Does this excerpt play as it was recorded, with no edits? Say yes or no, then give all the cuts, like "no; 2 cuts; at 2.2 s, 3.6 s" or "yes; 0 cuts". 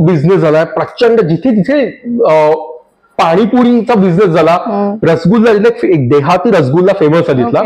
yes; 0 cuts